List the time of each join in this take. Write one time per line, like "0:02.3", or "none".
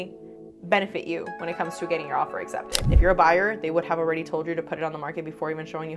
0:02.7